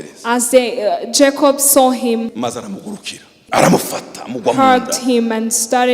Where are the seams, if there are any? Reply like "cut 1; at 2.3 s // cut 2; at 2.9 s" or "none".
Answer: cut 1; at 2.3 s // cut 2; at 3.4 s